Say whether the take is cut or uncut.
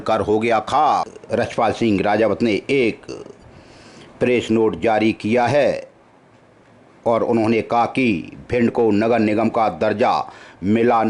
cut